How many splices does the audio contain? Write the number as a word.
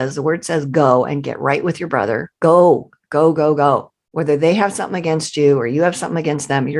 one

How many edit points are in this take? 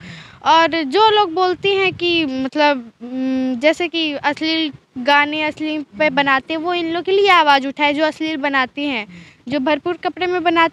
zero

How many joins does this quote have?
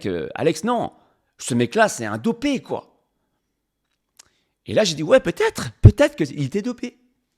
zero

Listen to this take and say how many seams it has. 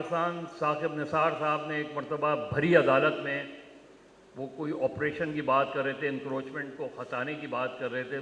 zero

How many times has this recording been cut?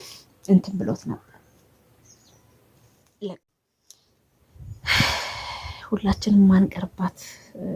one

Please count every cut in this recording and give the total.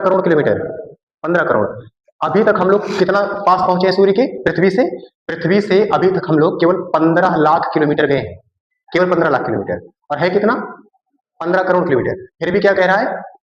zero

